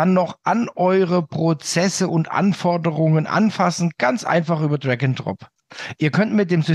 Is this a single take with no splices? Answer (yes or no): yes